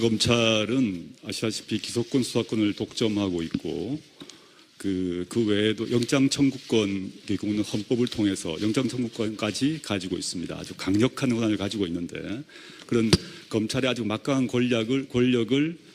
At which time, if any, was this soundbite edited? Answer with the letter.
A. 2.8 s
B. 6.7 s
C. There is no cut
B